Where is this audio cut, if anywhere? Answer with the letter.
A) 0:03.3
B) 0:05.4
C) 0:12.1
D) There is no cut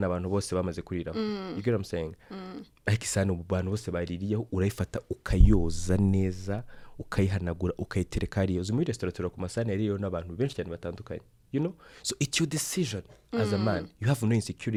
D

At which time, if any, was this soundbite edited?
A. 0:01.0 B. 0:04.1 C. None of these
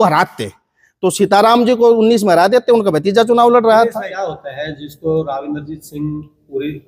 B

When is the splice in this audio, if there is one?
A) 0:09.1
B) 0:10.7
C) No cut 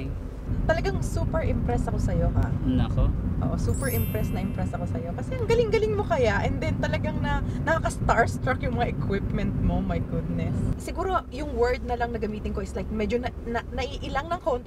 B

